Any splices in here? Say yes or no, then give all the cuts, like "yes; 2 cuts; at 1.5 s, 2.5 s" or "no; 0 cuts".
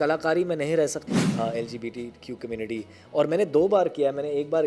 yes; 1 cut; at 1.0 s